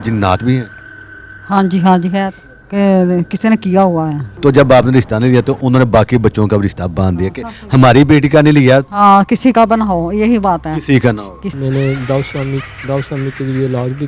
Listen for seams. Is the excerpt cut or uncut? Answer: cut